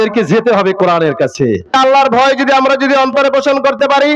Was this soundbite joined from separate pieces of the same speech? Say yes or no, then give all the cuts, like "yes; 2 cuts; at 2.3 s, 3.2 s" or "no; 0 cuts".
yes; 1 cut; at 1.7 s